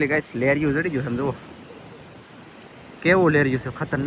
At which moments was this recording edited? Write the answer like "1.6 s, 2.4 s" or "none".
none